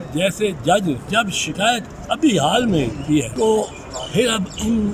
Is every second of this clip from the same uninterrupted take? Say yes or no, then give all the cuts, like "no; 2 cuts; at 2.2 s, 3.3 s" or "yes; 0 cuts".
no; 2 cuts; at 1.0 s, 3.3 s